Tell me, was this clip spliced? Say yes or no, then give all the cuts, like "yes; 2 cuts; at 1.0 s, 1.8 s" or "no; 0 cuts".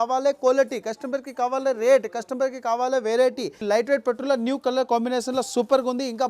yes; 1 cut; at 3.6 s